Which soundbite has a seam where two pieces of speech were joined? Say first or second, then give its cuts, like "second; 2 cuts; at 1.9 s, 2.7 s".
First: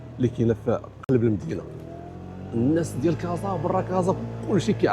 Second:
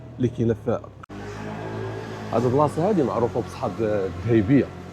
second; 1 cut; at 0.9 s